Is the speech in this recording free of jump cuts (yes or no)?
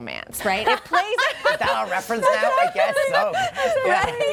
yes